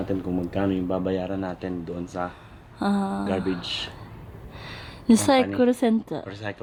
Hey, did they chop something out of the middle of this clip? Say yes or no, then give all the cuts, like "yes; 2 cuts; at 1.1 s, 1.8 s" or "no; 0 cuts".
no; 0 cuts